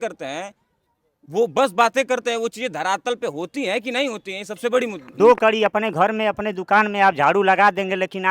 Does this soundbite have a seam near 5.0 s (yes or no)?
yes